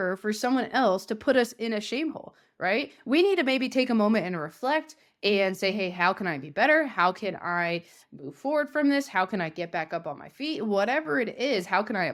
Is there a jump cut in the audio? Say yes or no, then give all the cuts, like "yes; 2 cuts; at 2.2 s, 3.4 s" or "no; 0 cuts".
no; 0 cuts